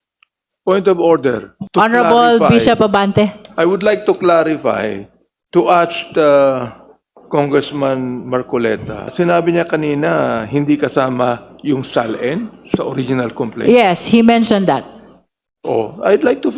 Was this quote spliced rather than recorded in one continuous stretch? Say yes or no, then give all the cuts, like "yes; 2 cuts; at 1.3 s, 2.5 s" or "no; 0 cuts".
yes; 2 cuts; at 1.5 s, 9.1 s